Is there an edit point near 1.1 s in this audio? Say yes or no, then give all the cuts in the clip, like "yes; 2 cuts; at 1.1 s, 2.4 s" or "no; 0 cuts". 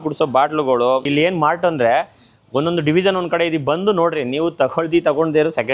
yes; 1 cut; at 1.1 s